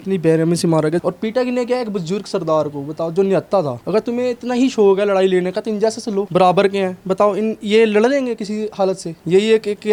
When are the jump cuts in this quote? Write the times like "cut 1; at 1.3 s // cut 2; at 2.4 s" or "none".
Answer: none